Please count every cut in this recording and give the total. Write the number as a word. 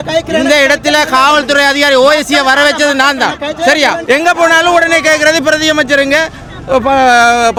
zero